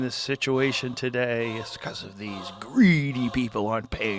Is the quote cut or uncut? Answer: uncut